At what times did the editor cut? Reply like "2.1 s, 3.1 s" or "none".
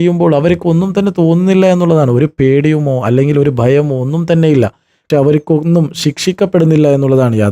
4.9 s